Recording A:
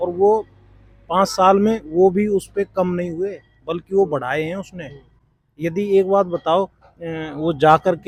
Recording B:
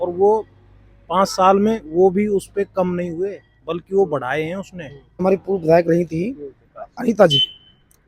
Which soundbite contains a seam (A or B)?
B